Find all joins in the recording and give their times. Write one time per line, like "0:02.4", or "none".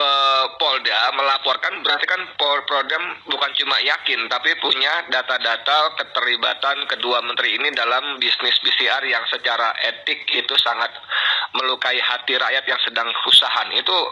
none

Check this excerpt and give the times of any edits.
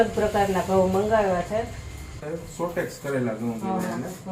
0:02.2

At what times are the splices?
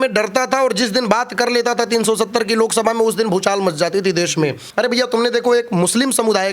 0:04.6

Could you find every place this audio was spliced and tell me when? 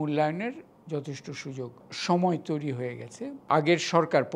0:01.9
0:03.4

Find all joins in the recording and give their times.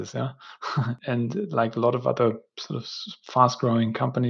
0:01.0

